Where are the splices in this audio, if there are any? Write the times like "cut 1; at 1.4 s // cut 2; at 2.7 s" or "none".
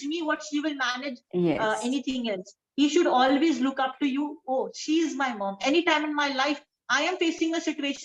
none